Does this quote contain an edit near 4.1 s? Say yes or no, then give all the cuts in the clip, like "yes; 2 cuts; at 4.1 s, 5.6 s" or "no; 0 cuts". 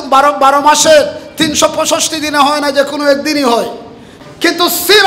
yes; 1 cut; at 4.1 s